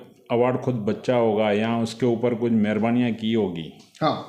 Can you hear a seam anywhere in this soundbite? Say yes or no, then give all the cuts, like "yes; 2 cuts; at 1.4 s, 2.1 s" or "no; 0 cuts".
no; 0 cuts